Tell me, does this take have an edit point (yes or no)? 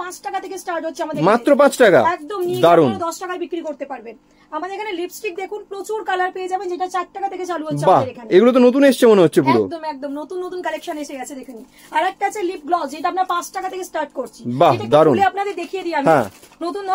no